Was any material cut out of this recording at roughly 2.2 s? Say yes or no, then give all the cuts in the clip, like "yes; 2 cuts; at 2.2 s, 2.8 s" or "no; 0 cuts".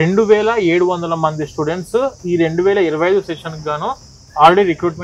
no; 0 cuts